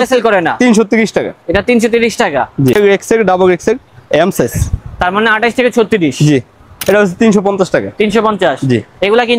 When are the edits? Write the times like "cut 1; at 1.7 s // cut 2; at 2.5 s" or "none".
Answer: cut 1; at 2.8 s // cut 2; at 6.6 s